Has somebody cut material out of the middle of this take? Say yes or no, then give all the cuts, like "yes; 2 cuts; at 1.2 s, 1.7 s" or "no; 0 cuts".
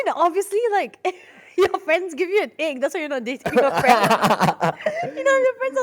no; 0 cuts